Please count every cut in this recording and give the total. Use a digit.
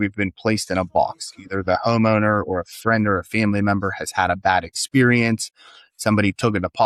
0